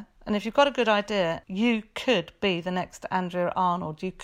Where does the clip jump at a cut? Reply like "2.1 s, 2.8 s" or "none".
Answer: 1.4 s